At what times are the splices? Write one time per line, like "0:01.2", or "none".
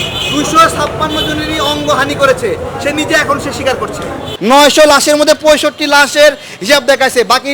0:04.3